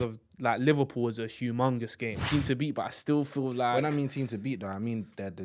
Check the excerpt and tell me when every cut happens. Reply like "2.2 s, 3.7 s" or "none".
2.3 s